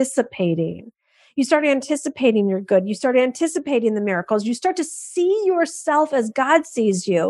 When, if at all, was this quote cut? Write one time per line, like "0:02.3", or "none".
none